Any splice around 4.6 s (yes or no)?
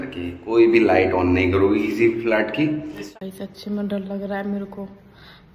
no